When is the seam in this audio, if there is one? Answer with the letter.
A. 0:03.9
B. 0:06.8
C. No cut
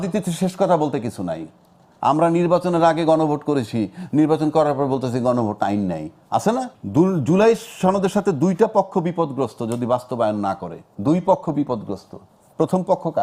B